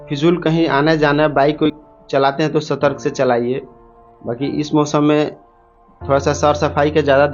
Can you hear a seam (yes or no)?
yes